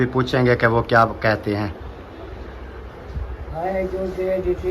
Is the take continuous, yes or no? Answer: no